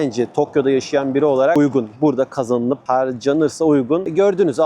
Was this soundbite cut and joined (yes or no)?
yes